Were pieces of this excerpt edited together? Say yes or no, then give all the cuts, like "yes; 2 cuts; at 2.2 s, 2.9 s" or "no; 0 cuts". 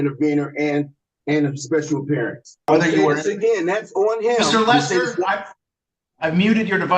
yes; 1 cut; at 2.7 s